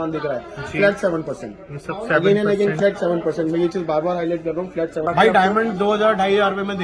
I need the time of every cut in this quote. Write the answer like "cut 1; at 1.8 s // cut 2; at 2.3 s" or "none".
cut 1; at 5.0 s